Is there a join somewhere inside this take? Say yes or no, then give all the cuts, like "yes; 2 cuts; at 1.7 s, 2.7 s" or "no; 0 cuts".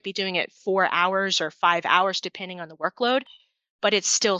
no; 0 cuts